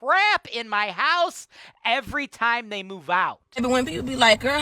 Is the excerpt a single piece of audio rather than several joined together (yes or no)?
no